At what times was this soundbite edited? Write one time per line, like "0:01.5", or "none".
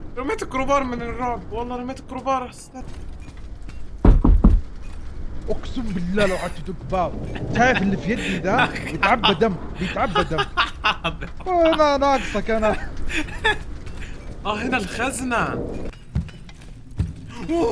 0:02.7
0:15.9